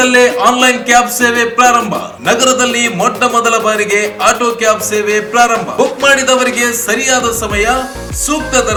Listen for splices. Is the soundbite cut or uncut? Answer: uncut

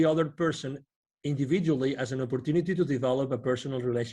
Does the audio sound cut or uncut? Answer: uncut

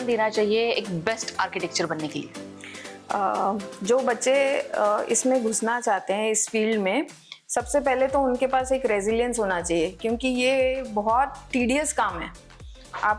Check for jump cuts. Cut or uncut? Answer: uncut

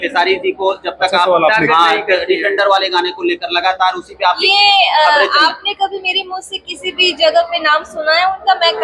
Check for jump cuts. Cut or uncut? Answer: uncut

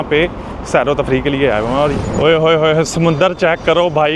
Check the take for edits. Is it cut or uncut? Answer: cut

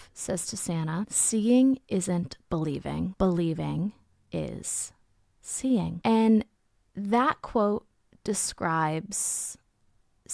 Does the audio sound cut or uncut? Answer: cut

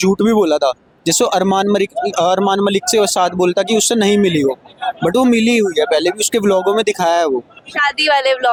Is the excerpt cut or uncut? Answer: uncut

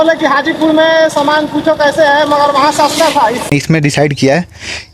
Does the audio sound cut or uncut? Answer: cut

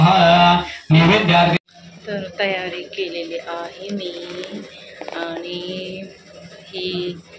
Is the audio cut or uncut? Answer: cut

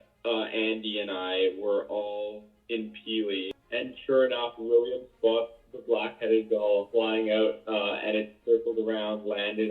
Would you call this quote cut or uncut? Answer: cut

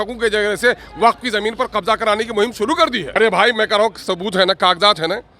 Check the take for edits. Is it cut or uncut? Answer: cut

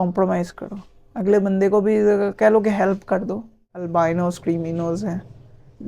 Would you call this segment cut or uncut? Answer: cut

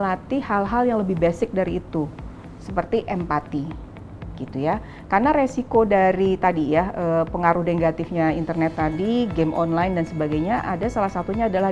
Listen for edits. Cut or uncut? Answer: uncut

